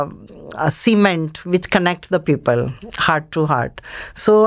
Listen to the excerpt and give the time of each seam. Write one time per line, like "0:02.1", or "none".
none

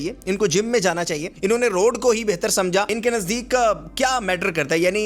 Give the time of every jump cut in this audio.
0:01.2
0:02.9

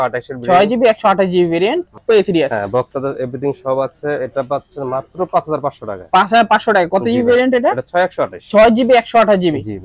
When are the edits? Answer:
0:02.0

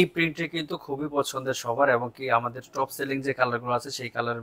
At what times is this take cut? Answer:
none

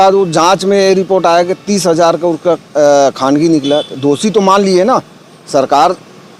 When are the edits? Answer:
none

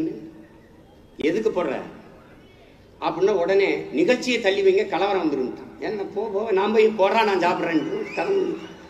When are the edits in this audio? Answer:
none

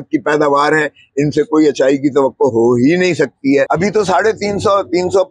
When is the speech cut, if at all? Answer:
0:03.7

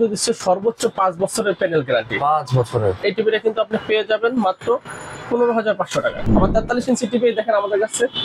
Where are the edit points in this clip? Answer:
0:03.0
0:06.2

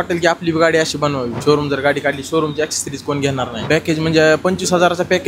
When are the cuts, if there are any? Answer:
0:01.3
0:03.6

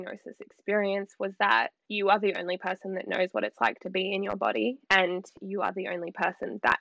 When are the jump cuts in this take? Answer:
0:01.8

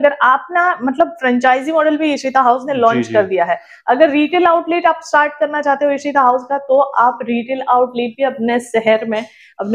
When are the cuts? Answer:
none

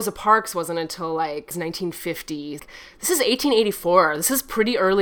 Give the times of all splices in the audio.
0:01.5
0:02.6

